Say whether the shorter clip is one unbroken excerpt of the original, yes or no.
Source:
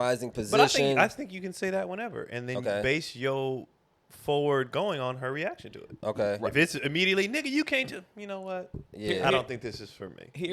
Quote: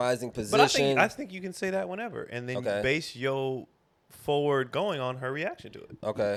yes